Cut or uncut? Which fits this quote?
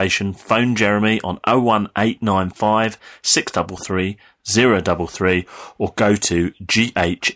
uncut